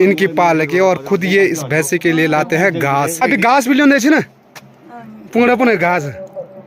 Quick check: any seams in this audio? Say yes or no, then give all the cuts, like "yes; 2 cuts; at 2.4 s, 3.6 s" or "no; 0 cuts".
yes; 1 cut; at 3.2 s